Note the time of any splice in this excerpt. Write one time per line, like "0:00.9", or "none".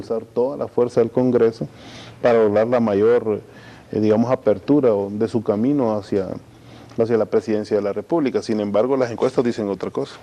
0:08.4

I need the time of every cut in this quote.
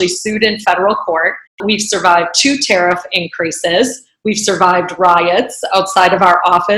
0:01.5

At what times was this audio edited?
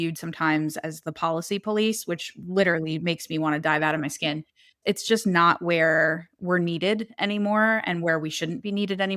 0:04.8

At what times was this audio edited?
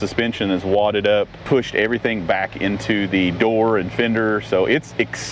0:01.4

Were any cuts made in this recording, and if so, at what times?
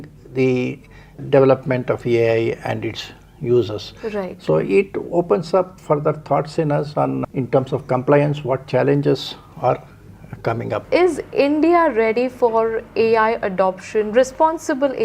0:10.8

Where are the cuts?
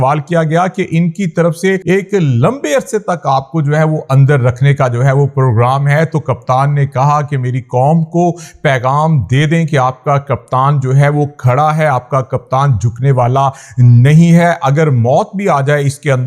0:01.8

